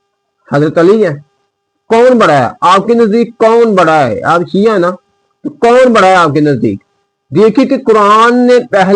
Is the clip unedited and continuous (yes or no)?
yes